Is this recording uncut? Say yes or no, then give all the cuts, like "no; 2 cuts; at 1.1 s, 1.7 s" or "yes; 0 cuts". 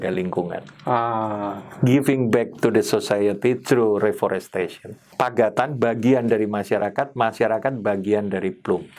no; 2 cuts; at 1.6 s, 5.1 s